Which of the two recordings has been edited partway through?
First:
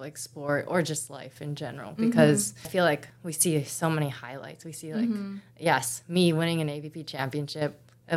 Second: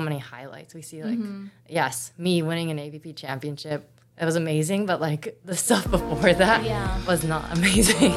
first; 1 cut; at 2.7 s

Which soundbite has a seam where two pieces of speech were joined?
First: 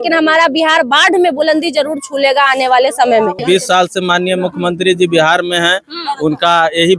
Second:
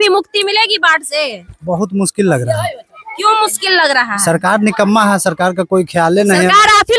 first; 1 cut; at 3.4 s

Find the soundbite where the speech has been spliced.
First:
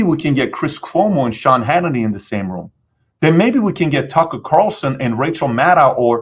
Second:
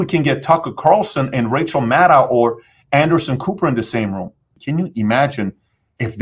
second; 1 cut; at 4.5 s

